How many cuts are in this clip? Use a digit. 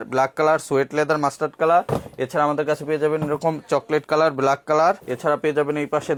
0